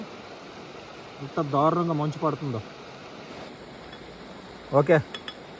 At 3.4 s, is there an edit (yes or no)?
yes